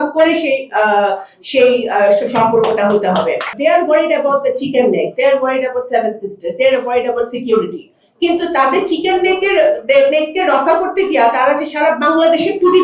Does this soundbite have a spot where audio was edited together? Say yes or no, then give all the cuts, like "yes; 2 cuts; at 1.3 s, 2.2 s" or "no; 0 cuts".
yes; 1 cut; at 3.5 s